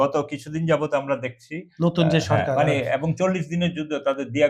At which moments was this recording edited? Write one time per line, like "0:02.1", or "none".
none